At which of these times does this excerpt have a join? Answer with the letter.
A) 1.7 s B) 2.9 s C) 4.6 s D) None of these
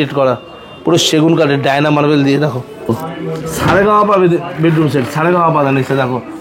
B